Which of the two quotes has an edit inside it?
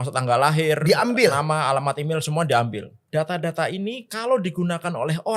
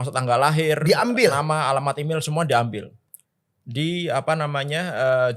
first; 1 cut; at 3.0 s

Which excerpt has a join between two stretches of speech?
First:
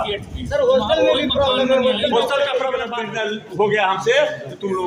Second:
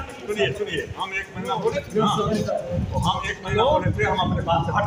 first; 1 cut; at 3.0 s

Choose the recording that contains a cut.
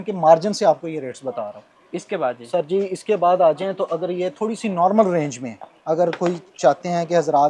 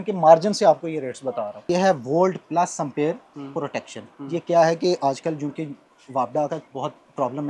second; 1 cut; at 1.6 s

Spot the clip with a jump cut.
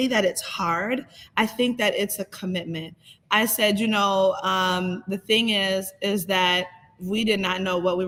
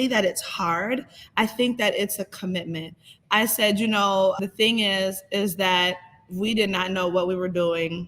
second; 1 cut; at 4.4 s

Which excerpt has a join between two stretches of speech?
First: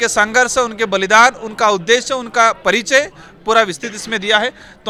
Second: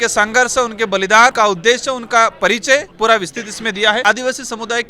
second; 3 cuts; at 1.3 s, 2.9 s, 4.0 s

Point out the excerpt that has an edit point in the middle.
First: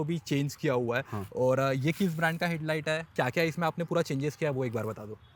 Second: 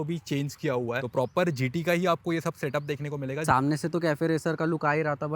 second; 2 cuts; at 1.0 s, 3.4 s

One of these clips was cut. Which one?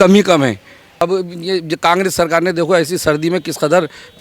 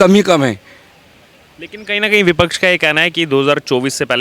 first; 1 cut; at 1.0 s

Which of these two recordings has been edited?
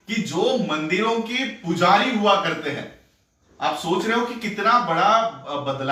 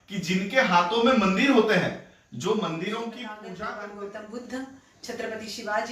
second; 1 cut; at 3.4 s

